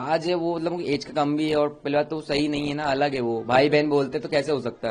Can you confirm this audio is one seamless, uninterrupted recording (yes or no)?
yes